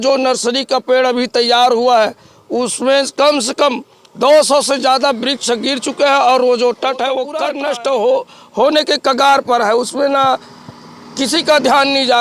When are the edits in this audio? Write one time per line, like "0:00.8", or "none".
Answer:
0:07.3